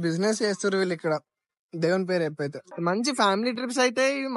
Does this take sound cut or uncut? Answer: cut